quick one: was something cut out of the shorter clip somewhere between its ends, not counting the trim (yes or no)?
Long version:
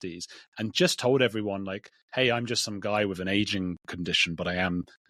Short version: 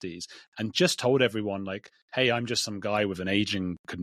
no